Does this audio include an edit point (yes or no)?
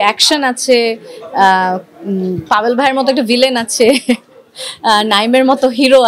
no